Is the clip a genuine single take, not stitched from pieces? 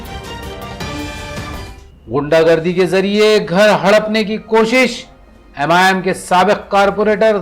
yes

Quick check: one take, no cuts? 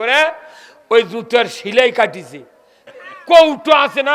no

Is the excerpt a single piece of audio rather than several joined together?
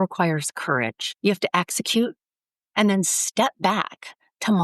no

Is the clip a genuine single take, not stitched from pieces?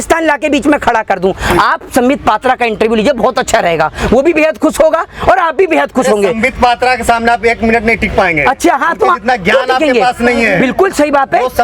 yes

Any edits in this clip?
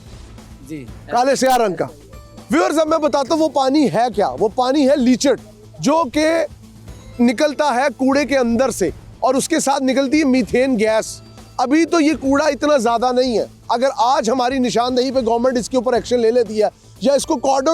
no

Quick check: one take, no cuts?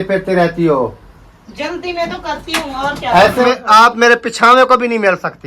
no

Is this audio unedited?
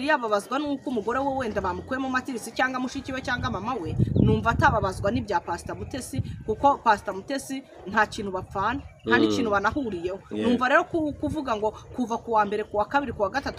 yes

